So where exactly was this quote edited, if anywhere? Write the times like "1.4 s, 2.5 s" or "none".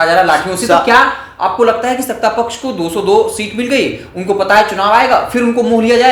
none